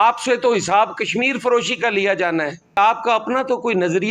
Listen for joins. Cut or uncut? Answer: cut